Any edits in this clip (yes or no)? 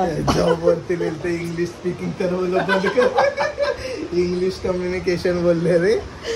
no